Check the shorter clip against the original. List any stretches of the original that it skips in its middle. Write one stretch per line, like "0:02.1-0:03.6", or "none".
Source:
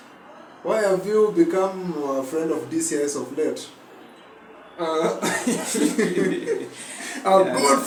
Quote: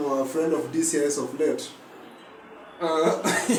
none